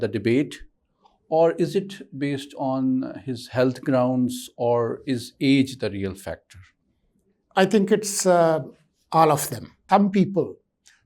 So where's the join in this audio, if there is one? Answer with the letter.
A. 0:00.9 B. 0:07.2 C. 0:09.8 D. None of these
C